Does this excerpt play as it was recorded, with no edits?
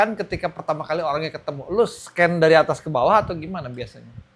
yes; 0 cuts

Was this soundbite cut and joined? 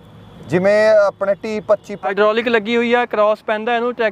yes; 1 cut; at 2.1 s

